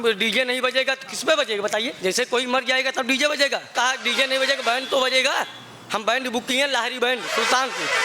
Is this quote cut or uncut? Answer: cut